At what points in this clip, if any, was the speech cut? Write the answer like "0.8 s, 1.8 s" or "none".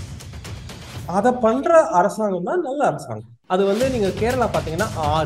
3.3 s